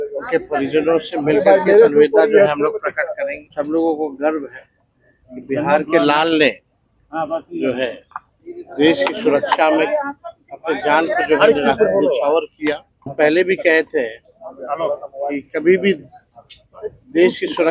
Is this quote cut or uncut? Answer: cut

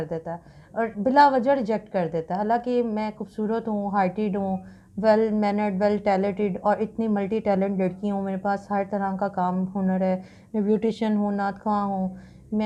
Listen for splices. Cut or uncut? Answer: uncut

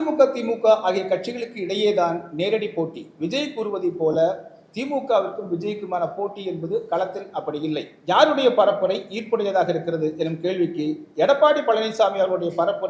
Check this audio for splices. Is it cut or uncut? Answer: cut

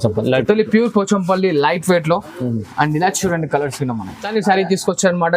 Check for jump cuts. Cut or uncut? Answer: cut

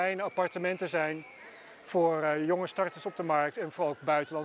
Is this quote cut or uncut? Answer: uncut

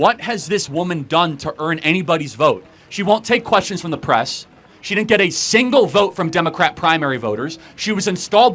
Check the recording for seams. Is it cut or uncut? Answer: uncut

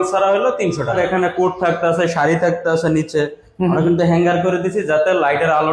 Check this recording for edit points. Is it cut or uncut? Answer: cut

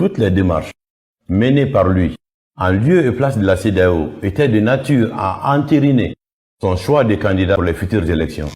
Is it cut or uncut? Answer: cut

